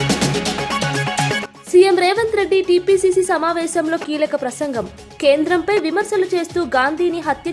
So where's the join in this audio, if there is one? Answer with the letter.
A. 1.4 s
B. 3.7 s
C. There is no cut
C